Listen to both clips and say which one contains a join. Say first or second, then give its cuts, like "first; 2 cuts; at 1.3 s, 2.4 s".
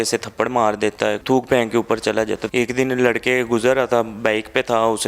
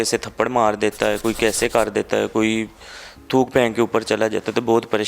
first; 2 cuts; at 1.2 s, 2.4 s